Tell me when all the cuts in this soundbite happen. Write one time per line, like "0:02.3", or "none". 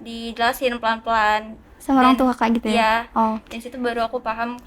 none